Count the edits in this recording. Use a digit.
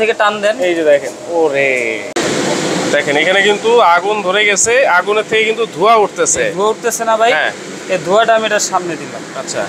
1